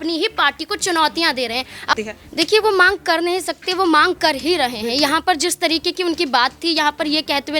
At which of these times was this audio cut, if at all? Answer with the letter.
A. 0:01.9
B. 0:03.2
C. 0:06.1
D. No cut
A